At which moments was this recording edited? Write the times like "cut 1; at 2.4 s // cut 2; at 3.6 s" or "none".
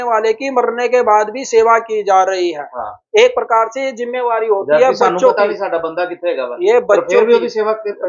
none